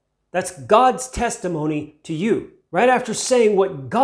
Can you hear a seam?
yes; 1 cut; at 2.6 s

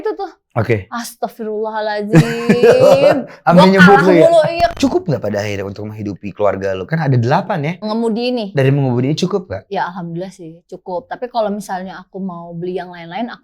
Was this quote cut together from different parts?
yes; 2 cuts; at 4.7 s, 7.9 s

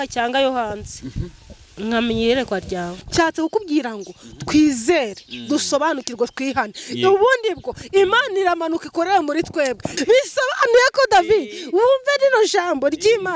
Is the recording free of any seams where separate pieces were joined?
no; 2 cuts; at 3.0 s, 9.9 s

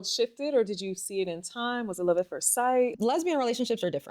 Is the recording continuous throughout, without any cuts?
no; 1 cut; at 2.9 s

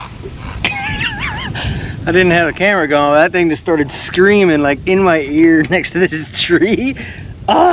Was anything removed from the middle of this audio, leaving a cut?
no; 0 cuts

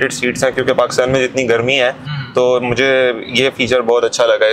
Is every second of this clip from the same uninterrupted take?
yes; 0 cuts

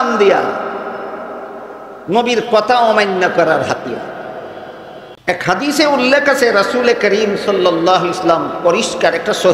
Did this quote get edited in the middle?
yes; 1 cut; at 5.1 s

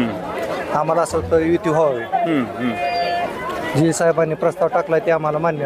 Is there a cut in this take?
no; 0 cuts

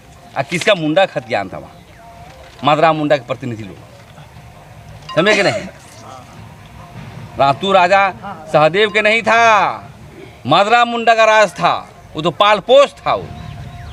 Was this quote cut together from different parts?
no; 0 cuts

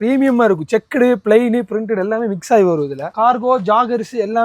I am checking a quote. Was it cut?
yes; 1 cut; at 3.0 s

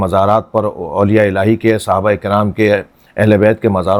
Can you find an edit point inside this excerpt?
no; 0 cuts

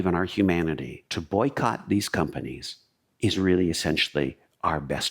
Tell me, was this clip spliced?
no; 0 cuts

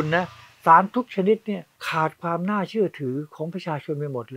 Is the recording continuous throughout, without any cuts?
no; 1 cut; at 1.7 s

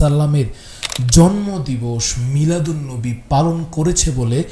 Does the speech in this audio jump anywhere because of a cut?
no; 0 cuts

